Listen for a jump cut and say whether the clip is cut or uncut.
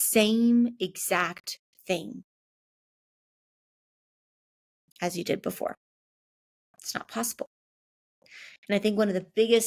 uncut